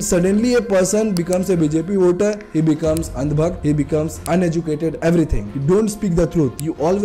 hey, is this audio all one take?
no; 1 cut; at 5.4 s

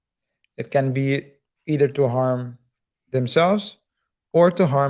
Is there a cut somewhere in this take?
no; 0 cuts

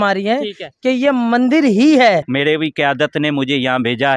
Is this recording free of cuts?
no; 1 cut; at 2.3 s

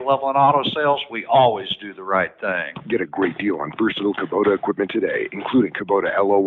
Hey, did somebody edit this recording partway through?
yes; 2 cuts; at 2.7 s, 5.2 s

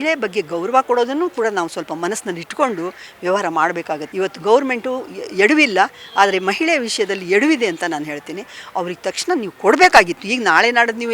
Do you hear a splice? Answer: yes; 1 cut; at 4.1 s

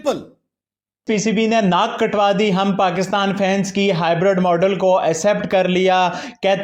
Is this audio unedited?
no; 1 cut; at 0.9 s

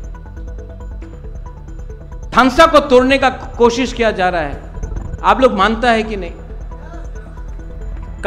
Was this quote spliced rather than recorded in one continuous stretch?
yes; 1 cut; at 2.3 s

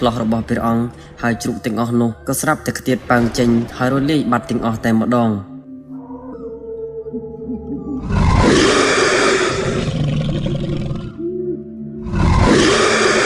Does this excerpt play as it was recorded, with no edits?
no; 1 cut; at 6.3 s

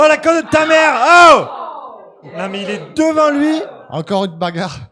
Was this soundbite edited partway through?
yes; 1 cut; at 2.3 s

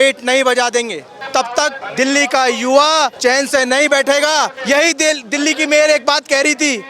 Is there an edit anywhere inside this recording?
yes; 4 cuts; at 1.2 s, 1.8 s, 3.1 s, 4.6 s

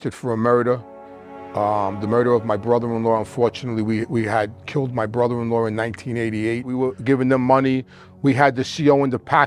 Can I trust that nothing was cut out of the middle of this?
no; 1 cut; at 6.7 s

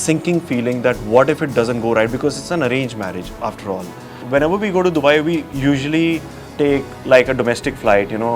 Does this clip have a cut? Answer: yes; 1 cut; at 4.2 s

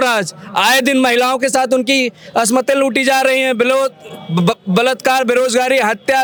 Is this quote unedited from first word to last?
yes; 0 cuts

